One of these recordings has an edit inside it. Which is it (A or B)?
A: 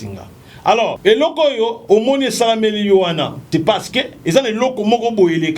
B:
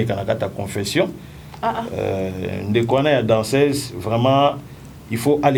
A